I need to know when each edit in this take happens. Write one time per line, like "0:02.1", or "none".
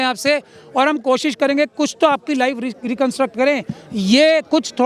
none